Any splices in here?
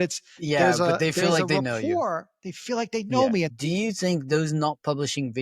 yes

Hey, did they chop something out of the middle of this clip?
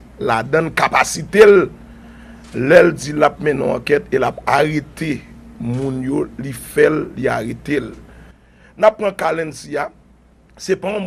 no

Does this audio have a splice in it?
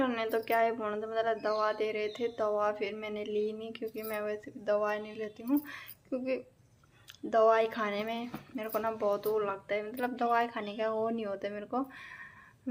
no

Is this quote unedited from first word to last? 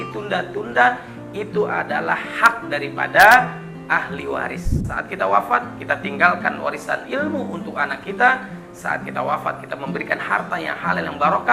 no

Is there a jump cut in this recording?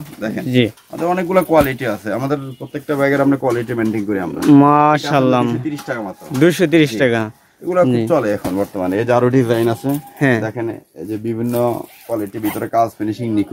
no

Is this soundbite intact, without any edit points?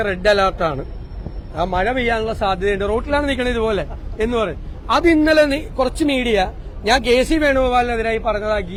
yes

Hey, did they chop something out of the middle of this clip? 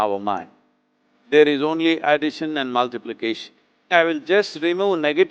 yes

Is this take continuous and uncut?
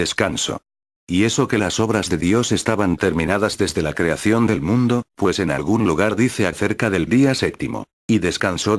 no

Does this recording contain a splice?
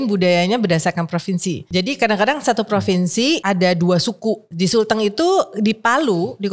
yes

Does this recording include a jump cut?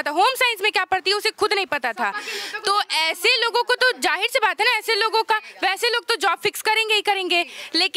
no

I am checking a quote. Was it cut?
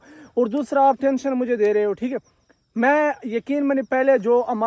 no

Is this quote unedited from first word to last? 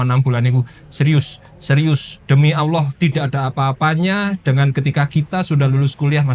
yes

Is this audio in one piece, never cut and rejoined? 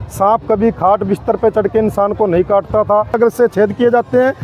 no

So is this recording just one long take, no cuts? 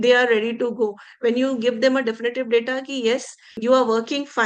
no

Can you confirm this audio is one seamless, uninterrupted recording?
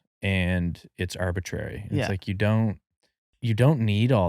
no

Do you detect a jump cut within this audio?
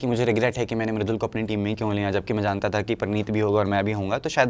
no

